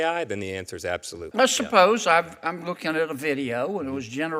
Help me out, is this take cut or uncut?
cut